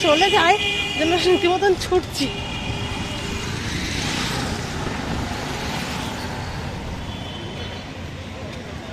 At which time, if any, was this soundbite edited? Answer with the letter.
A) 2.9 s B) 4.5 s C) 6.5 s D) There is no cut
D